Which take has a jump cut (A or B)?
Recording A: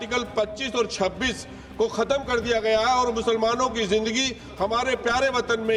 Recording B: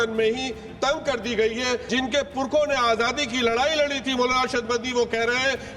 B